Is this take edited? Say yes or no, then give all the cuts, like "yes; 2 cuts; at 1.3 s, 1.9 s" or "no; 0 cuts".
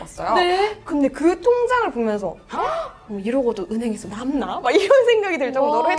no; 0 cuts